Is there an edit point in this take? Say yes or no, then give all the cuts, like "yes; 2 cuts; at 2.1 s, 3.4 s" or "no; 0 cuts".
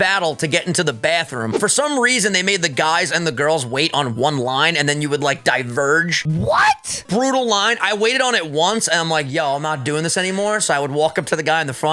yes; 2 cuts; at 1.5 s, 6.5 s